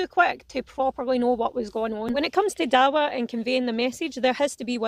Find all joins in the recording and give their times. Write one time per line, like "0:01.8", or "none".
0:02.1